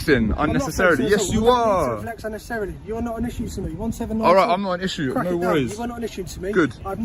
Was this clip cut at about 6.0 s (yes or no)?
no